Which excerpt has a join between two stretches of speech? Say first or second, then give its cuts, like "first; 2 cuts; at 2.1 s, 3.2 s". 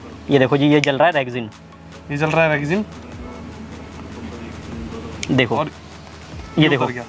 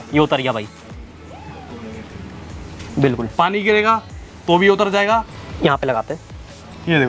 second; 1 cut; at 5.4 s